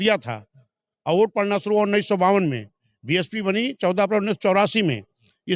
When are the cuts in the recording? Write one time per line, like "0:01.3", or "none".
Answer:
none

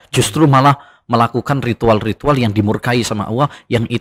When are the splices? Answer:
none

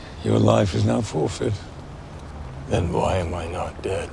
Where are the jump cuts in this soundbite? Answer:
0:02.1

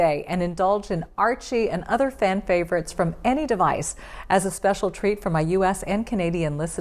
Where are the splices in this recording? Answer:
none

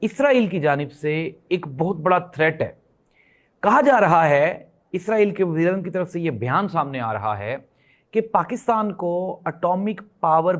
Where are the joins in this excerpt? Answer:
none

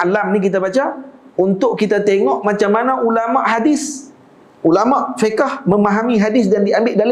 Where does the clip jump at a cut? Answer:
none

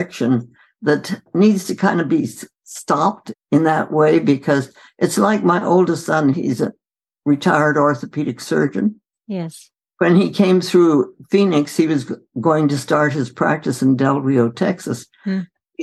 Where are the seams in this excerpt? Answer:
0:01.2
0:03.3

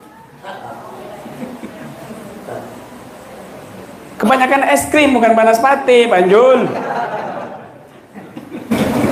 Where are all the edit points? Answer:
none

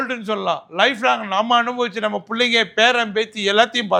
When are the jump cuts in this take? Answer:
none

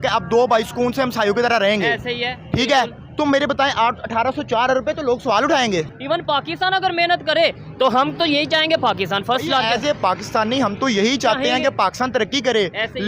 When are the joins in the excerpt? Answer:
0:05.9

